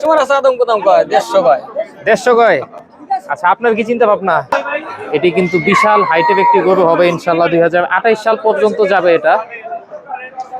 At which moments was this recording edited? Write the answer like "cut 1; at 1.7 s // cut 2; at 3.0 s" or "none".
cut 1; at 4.5 s